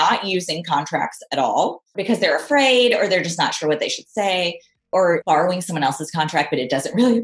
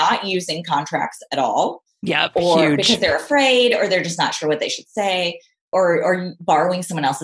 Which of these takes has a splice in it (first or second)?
first